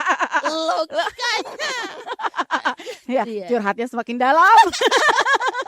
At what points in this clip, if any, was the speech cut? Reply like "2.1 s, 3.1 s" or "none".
none

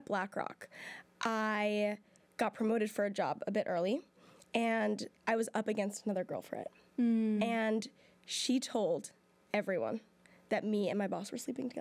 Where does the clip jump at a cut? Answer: none

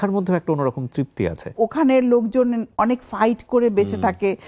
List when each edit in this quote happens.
1.5 s

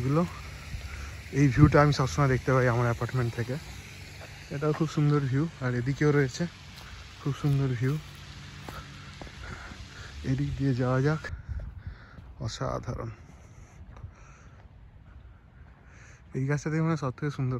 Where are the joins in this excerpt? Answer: 11.4 s

